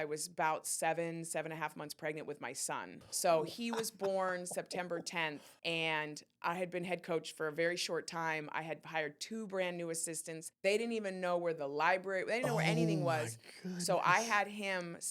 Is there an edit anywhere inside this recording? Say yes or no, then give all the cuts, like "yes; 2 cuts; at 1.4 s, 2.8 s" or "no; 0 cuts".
yes; 3 cuts; at 3.0 s, 5.5 s, 10.4 s